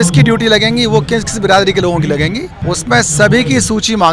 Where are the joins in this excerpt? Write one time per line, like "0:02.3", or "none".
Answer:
0:02.5